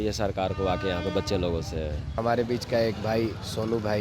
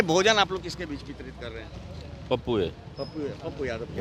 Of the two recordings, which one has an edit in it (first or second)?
first